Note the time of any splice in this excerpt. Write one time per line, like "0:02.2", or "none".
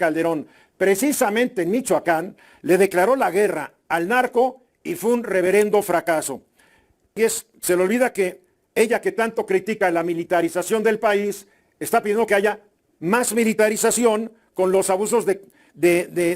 0:07.2